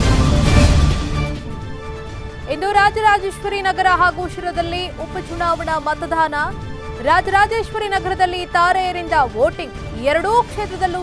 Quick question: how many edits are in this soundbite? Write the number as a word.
one